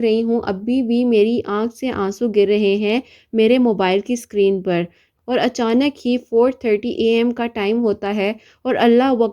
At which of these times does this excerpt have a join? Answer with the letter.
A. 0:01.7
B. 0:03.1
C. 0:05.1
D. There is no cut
C